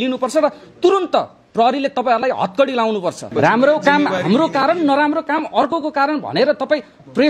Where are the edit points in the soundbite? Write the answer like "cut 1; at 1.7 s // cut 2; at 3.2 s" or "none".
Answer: cut 1; at 3.3 s